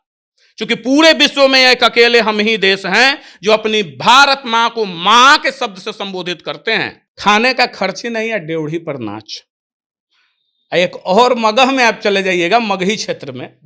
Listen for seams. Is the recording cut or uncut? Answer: cut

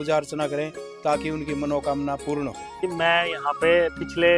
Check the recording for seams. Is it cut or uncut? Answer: cut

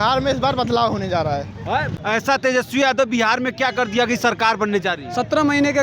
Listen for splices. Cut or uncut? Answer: cut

